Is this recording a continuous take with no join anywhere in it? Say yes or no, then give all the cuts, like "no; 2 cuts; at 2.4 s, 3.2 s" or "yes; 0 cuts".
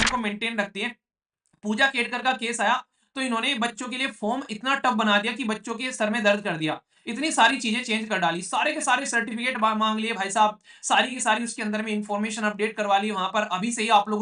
yes; 0 cuts